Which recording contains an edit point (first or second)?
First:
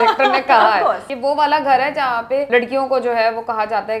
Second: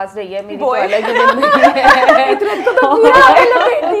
first